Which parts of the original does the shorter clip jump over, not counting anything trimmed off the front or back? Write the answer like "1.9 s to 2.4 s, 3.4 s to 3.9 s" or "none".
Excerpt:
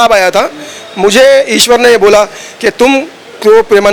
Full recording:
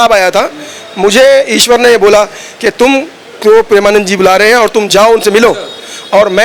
none